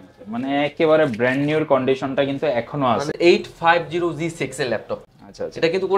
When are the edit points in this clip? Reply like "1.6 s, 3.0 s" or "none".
3.1 s